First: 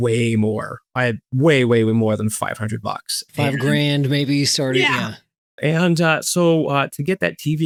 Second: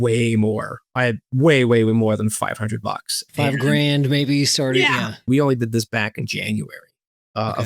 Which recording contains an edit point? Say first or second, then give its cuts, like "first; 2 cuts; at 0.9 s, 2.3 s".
second; 1 cut; at 5.2 s